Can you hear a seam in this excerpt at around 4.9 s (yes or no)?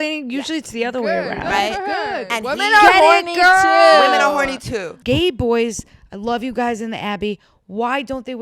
yes